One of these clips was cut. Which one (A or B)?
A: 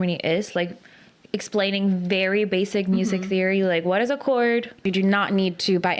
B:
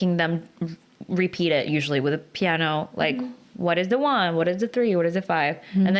A